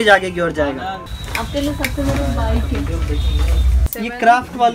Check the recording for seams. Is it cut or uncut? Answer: cut